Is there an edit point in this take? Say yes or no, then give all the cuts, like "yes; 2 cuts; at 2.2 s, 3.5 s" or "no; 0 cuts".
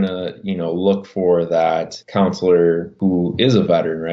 yes; 2 cuts; at 2.0 s, 2.9 s